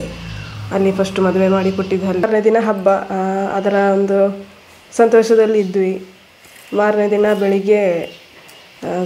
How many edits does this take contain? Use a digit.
1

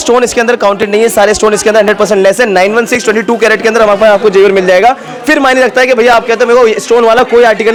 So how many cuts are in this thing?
0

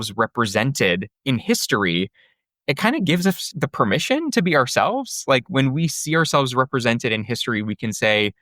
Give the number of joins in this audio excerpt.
2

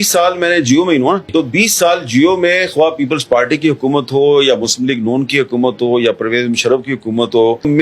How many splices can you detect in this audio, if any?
1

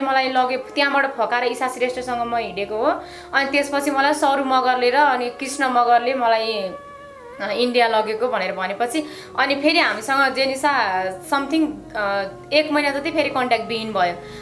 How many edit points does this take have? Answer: 0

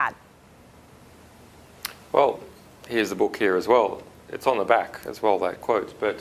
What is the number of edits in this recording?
1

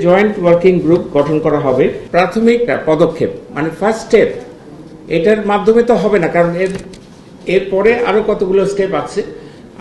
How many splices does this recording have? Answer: 1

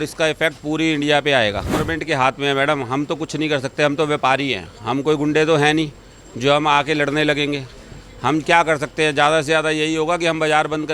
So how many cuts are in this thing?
1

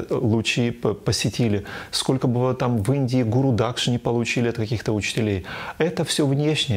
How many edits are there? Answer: 0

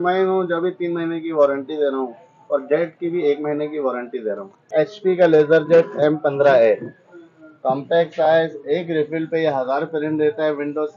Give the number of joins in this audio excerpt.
1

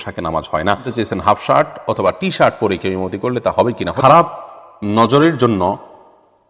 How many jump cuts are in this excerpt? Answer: 2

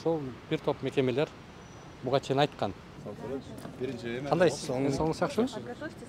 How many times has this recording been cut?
0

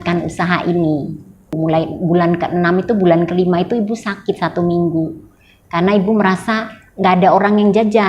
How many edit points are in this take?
1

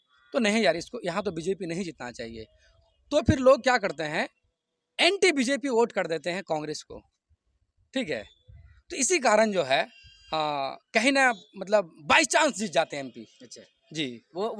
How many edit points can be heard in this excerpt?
0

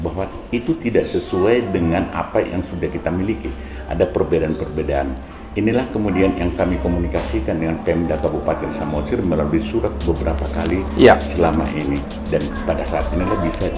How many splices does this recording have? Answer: 0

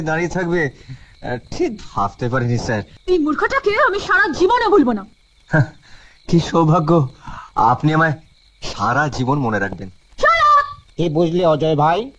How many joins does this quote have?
2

